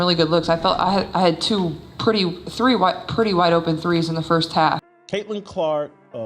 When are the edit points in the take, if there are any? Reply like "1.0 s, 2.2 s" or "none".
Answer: 5.0 s